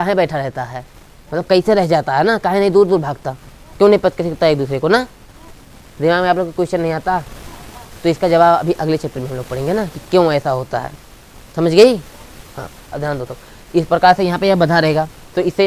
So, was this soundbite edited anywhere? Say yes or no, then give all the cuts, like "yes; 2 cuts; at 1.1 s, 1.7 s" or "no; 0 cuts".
no; 0 cuts